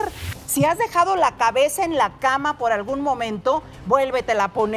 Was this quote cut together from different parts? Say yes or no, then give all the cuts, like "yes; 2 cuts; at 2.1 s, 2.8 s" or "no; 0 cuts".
no; 0 cuts